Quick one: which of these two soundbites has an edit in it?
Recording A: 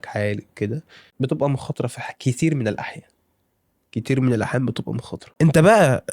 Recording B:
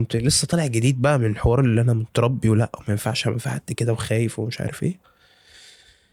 A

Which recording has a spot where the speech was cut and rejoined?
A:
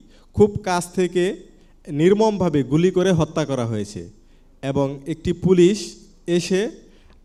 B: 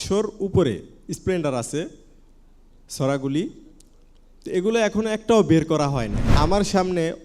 B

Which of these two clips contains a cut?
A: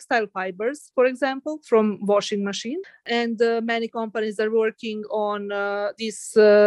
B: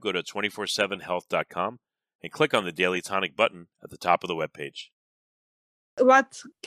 B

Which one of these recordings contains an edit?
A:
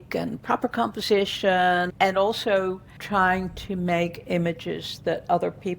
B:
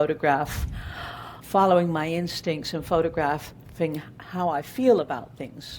A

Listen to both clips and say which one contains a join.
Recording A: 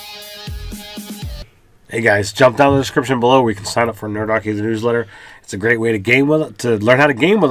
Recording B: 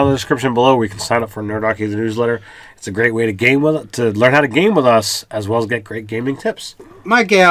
A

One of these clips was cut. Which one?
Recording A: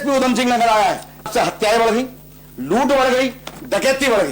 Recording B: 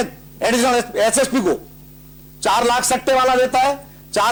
A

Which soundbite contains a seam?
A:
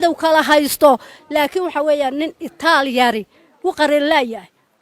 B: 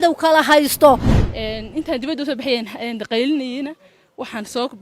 B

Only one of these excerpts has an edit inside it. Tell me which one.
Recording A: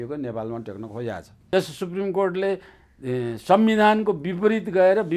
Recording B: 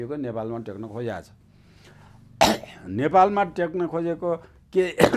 A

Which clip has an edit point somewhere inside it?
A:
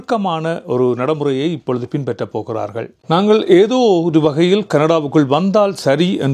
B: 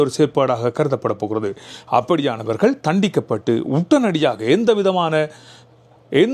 A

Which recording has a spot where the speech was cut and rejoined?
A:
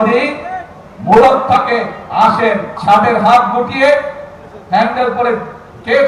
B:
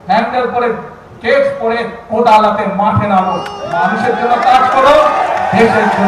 A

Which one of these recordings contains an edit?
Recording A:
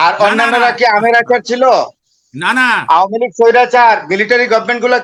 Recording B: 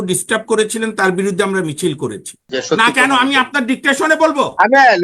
B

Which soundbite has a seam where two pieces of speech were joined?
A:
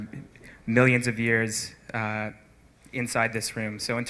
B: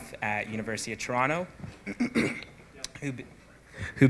A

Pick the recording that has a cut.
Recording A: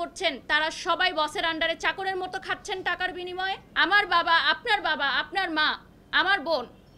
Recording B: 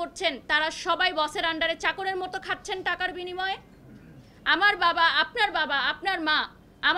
A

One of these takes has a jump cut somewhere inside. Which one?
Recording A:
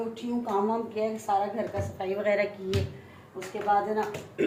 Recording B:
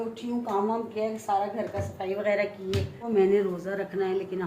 B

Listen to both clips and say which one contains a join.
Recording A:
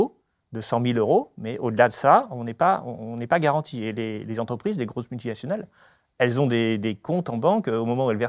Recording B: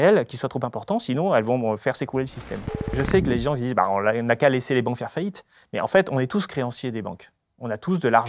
B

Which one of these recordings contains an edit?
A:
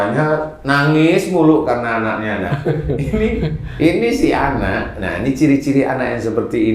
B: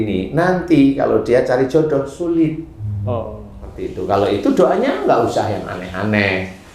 B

